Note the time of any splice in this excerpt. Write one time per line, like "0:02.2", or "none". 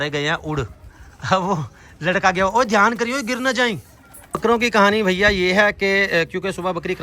0:04.3

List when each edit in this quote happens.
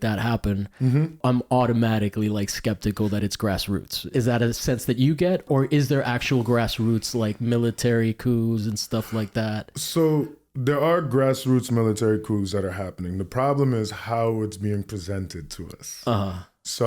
0:01.2
0:04.1
0:05.5

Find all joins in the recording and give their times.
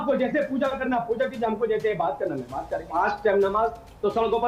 0:02.9

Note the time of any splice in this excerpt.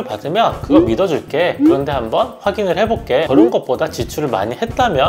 0:03.3

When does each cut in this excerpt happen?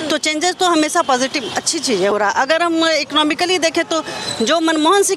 0:02.1

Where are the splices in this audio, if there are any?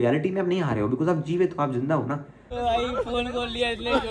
0:02.5

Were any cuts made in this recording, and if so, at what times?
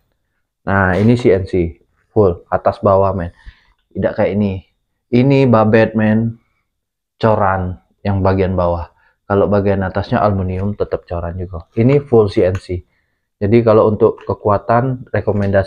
none

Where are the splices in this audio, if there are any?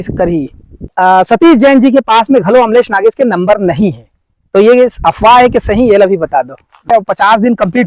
0:00.9
0:06.9

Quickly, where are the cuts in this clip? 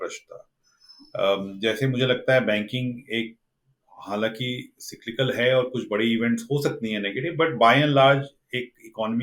none

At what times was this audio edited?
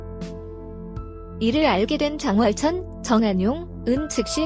0:01.4

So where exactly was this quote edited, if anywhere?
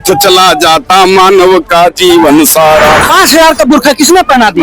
0:03.0

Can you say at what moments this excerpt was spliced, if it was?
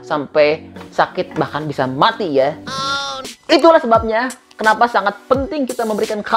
0:03.2

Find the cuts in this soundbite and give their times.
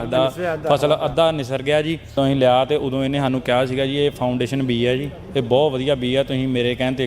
0:02.1

